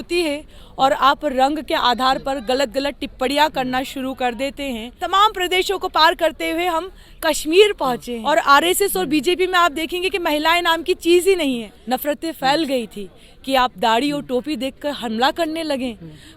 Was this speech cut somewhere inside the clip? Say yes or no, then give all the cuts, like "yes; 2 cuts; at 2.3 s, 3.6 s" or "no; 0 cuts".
yes; 3 cuts; at 4.9 s, 8.1 s, 11.7 s